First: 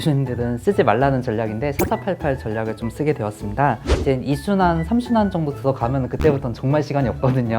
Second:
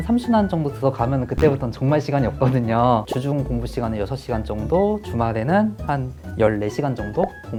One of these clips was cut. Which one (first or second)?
first